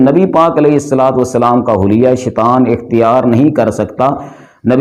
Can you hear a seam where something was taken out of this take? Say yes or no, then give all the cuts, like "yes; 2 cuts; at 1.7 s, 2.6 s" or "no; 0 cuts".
no; 0 cuts